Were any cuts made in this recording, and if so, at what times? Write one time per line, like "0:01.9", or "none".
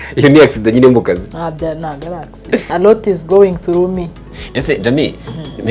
0:02.6